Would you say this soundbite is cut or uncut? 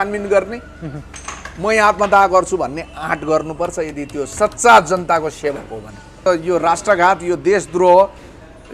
cut